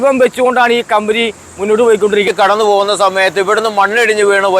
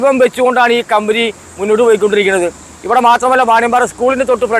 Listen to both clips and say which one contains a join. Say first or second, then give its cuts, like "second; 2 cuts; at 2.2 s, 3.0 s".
first; 1 cut; at 2.2 s